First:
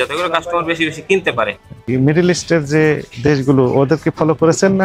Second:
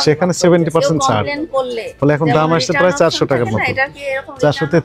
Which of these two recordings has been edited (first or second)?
first